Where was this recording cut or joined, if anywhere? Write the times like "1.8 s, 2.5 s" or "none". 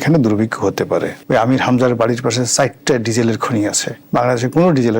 1.2 s, 4.0 s

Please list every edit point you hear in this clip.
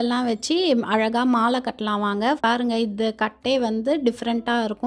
2.4 s

